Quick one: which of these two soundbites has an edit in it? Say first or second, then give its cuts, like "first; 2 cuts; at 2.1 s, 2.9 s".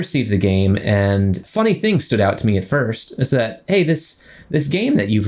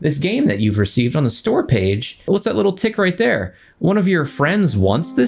second; 1 cut; at 2.2 s